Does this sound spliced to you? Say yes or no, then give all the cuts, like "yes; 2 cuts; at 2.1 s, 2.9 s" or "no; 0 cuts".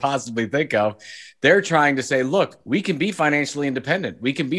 yes; 1 cut; at 2.6 s